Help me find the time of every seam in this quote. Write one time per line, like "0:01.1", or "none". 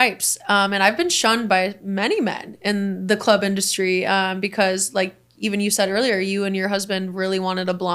none